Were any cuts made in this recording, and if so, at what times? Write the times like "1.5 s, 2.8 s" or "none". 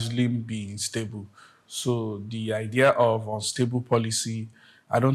none